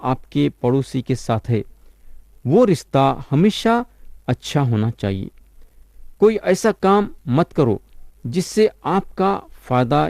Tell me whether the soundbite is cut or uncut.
uncut